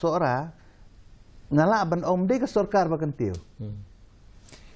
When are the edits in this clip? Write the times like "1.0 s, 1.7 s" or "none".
none